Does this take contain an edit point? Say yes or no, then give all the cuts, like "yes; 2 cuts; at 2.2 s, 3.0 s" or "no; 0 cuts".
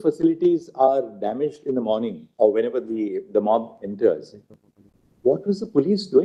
no; 0 cuts